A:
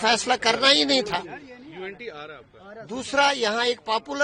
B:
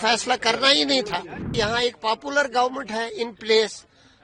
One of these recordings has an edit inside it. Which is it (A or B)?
B